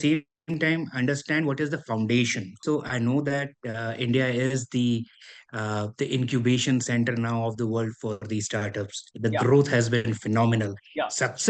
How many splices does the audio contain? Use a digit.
1